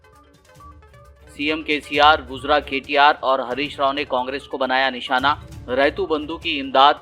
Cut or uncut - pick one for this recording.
cut